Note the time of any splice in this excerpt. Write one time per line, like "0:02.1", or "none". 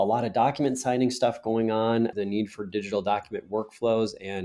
0:02.1